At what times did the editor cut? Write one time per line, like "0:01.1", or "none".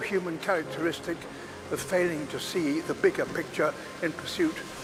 none